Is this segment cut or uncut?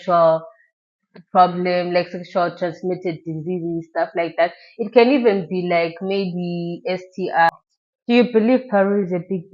cut